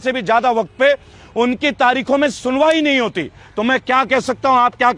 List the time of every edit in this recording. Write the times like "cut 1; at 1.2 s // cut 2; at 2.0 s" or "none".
none